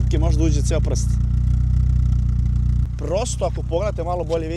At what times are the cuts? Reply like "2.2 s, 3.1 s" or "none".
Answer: none